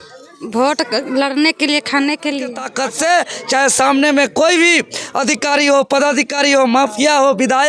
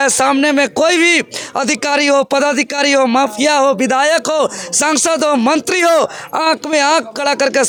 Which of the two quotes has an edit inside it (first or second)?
first